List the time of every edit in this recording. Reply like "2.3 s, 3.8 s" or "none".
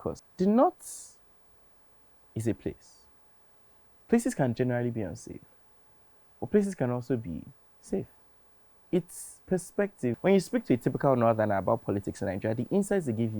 10.2 s